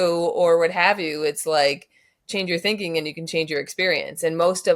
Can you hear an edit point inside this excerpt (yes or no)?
no